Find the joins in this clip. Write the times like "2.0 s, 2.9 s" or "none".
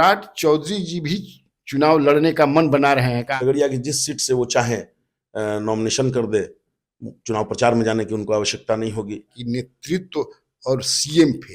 3.3 s, 9.3 s